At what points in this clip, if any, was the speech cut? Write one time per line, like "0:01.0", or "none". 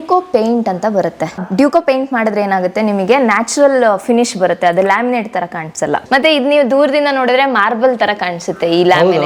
0:01.3
0:06.0